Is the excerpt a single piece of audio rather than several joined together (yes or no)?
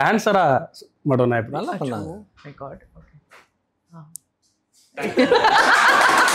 yes